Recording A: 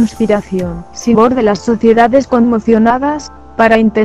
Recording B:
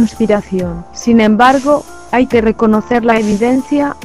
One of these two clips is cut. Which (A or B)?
B